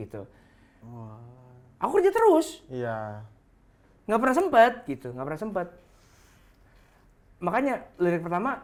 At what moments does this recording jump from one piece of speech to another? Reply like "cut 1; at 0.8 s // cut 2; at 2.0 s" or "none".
none